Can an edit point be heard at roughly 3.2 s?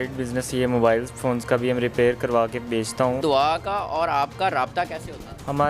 yes; 1 cut; at 3.2 s

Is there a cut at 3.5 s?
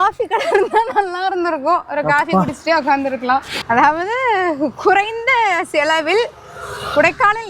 yes; 1 cut; at 3.5 s

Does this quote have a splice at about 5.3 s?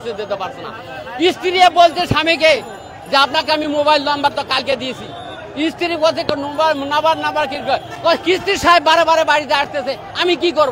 no; 0 cuts

